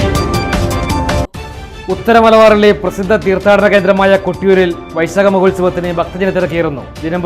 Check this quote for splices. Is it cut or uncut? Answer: cut